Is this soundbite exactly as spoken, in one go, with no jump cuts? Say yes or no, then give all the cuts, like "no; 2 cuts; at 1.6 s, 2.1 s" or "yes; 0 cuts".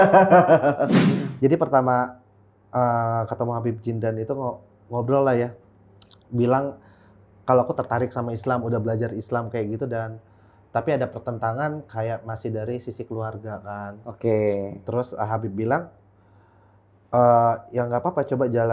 no; 1 cut; at 0.9 s